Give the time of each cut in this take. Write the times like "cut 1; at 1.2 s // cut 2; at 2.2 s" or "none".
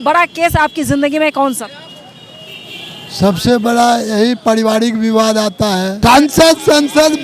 cut 1; at 6.2 s